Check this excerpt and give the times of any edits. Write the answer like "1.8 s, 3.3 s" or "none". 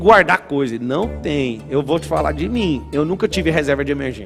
2.8 s